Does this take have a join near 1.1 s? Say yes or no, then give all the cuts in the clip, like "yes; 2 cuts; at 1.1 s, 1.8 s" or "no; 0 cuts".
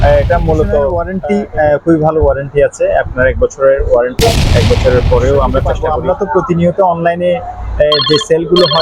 yes; 2 cuts; at 1.1 s, 5.8 s